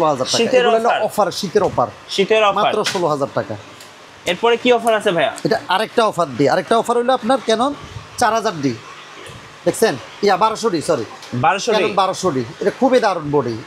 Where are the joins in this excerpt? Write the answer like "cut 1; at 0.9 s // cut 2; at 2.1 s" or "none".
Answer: none